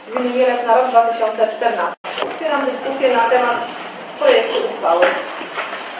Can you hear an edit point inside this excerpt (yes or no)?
yes